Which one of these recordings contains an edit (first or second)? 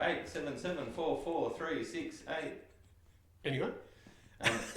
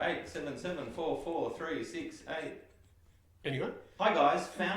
second